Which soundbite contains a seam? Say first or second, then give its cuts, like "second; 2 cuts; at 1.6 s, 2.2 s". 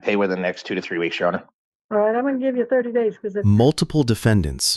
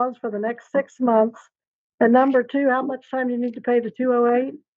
first; 1 cut; at 3.4 s